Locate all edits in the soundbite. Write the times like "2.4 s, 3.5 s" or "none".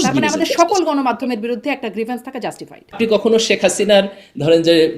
2.8 s